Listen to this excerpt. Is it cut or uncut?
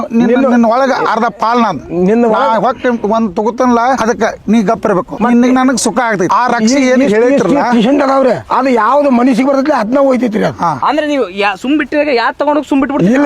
uncut